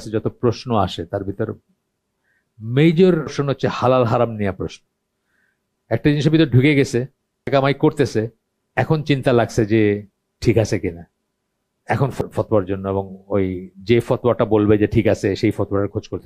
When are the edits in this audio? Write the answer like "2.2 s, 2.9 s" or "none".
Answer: 3.4 s, 7.5 s, 12.2 s